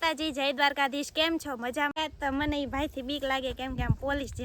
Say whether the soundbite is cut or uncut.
cut